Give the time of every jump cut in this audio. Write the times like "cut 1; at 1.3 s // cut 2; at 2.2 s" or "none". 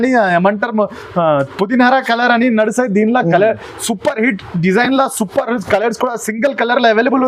none